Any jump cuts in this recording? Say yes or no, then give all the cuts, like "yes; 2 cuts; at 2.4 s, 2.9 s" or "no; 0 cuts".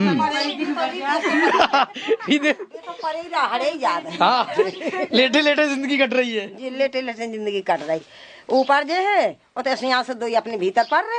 no; 0 cuts